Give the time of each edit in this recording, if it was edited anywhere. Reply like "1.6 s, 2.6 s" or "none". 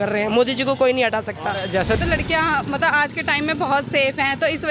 2.0 s

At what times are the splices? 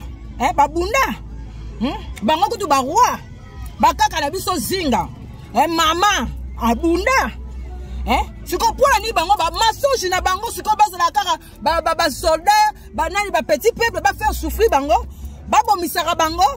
none

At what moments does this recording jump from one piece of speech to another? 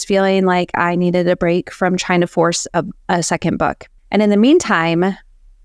3.9 s

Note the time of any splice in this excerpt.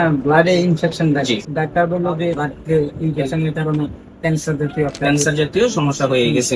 1.5 s, 2.4 s

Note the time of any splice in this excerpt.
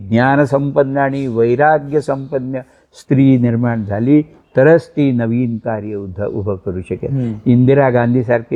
none

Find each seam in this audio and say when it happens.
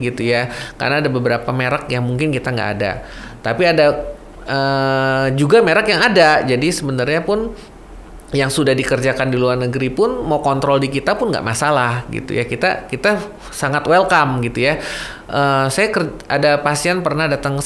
none

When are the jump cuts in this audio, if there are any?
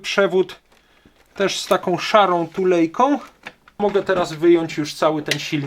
3.8 s

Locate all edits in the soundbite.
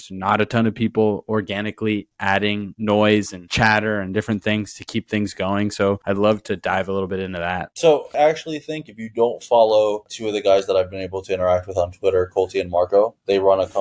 none

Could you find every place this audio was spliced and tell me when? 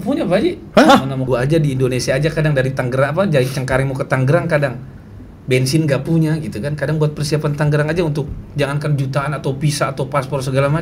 1.2 s

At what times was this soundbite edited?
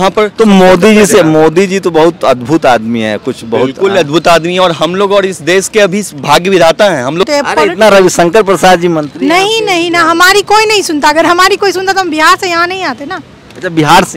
7.3 s

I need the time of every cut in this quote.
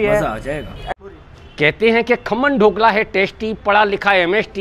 0.9 s

